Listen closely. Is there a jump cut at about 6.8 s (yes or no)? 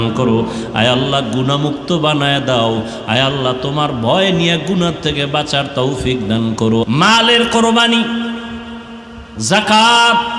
yes